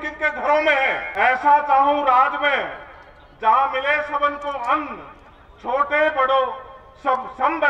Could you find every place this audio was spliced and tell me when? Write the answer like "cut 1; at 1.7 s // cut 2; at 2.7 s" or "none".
cut 1; at 1.1 s

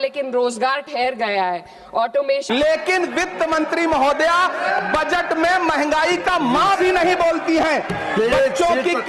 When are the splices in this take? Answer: cut 1; at 2.2 s

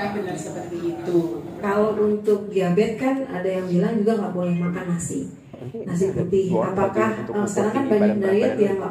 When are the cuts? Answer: cut 1; at 1.5 s

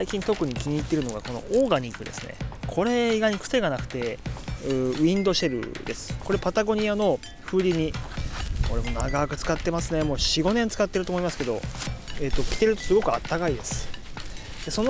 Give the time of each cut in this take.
cut 1; at 4.4 s // cut 2; at 11.9 s

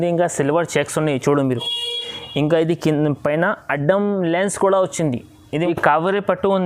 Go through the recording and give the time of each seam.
cut 1; at 5.7 s

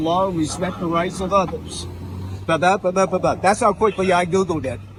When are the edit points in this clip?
none

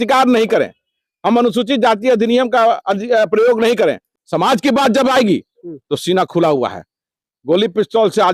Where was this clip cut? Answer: cut 1; at 4.1 s

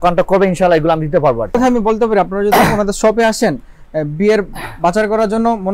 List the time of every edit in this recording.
cut 1; at 1.6 s

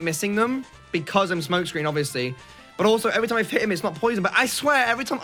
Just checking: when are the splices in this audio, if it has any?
none

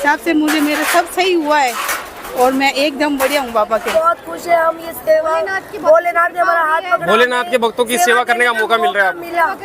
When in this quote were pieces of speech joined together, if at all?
cut 1; at 3.9 s

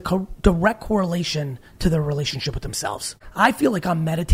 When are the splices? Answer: cut 1; at 3.2 s

